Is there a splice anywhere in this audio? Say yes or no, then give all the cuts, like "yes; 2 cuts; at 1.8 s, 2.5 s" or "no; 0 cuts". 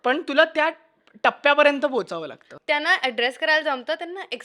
yes; 1 cut; at 2.3 s